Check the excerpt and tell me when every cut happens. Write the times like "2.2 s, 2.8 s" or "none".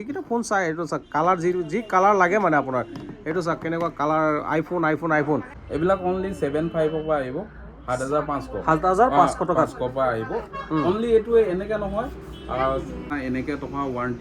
5.6 s, 13.1 s